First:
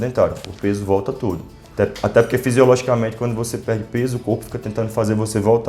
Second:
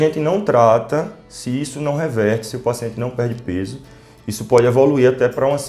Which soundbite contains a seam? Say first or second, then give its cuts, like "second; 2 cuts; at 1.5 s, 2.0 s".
first; 1 cut; at 1.6 s